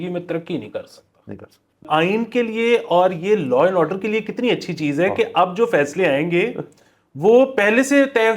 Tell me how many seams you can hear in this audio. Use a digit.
1